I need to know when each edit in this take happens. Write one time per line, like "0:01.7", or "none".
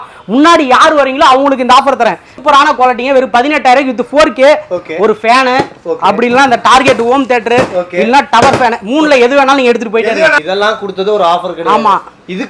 0:02.3
0:10.4